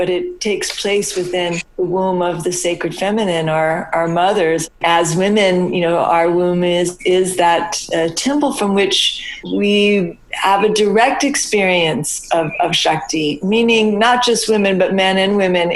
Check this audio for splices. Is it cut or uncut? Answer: cut